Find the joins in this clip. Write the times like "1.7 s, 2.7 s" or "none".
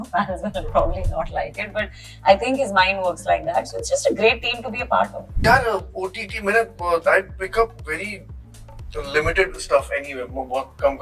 5.2 s